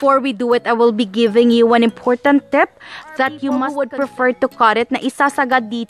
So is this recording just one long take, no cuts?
no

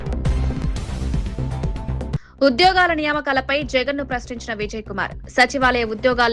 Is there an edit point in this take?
yes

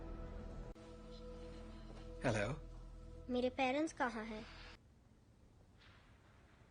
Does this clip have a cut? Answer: yes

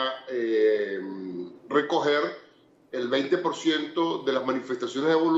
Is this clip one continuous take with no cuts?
yes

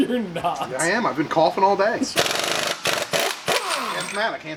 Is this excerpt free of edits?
yes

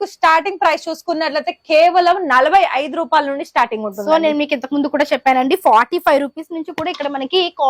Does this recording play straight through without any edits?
yes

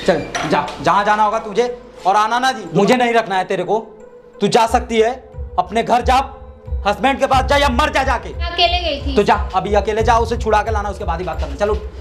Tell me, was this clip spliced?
yes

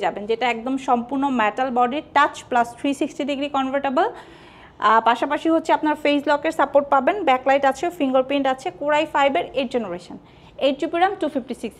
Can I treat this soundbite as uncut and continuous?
yes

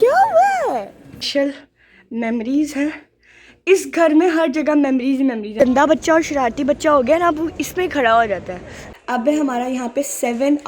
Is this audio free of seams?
no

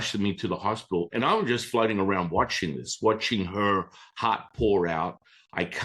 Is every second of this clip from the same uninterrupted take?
no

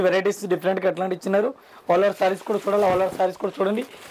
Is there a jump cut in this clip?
no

